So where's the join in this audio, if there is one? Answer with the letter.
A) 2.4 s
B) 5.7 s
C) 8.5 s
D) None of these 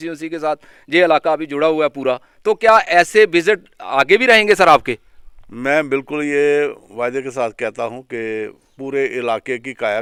D